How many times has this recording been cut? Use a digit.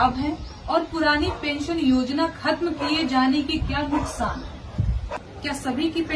1